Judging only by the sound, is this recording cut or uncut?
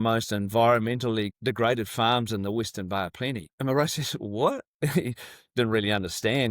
cut